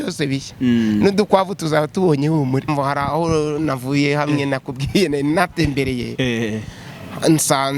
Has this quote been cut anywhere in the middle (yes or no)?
yes